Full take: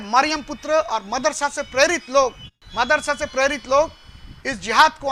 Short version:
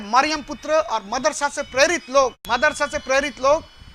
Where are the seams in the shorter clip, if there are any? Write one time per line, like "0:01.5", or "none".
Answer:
0:02.4